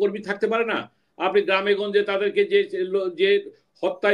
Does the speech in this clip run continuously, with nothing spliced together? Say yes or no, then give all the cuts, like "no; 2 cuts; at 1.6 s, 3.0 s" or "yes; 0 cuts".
yes; 0 cuts